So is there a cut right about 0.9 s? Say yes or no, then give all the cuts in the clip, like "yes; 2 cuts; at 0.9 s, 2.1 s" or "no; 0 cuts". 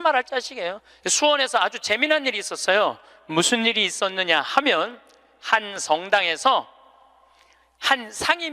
yes; 1 cut; at 0.9 s